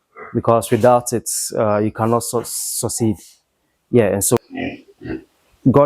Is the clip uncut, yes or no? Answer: no